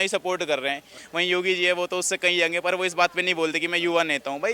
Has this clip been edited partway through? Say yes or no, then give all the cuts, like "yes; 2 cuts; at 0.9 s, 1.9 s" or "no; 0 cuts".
yes; 1 cut; at 1.0 s